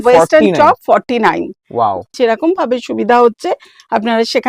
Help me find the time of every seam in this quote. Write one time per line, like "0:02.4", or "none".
0:02.1